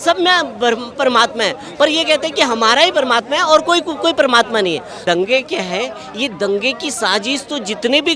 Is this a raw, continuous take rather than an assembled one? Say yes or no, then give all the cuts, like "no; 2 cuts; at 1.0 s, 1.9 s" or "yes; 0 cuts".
no; 1 cut; at 4.9 s